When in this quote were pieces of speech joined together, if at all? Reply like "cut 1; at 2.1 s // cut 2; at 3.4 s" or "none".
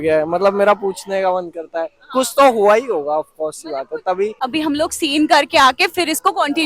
cut 1; at 4.4 s